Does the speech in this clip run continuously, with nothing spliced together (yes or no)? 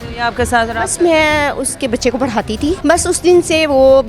no